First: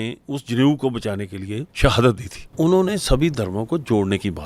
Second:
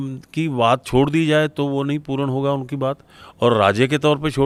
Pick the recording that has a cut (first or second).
first